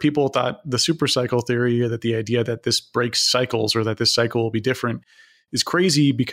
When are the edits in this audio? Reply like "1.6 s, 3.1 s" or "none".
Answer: none